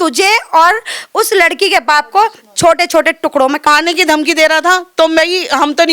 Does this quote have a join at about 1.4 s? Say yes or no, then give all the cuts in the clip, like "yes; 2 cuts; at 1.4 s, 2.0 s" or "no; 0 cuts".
no; 1 cut; at 3.7 s